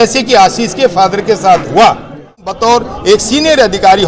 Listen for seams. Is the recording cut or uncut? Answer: cut